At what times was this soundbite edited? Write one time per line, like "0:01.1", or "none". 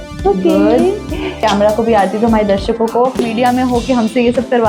0:01.4
0:03.2